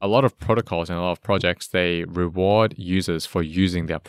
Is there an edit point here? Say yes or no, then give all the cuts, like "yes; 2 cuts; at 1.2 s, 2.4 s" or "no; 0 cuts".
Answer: no; 0 cuts